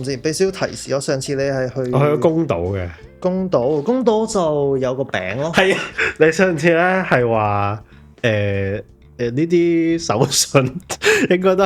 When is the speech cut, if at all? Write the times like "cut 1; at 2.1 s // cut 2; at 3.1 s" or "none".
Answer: cut 1; at 5.9 s